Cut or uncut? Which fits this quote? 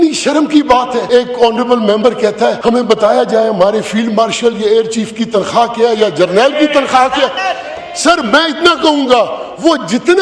cut